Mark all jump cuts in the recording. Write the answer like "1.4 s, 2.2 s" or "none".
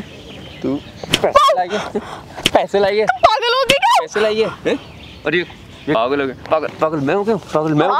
6.0 s